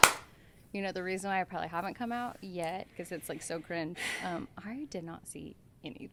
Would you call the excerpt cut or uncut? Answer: uncut